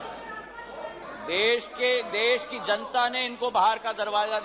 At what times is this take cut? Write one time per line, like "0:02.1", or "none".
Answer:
0:01.0